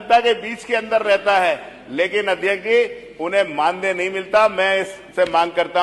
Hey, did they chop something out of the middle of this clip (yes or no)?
no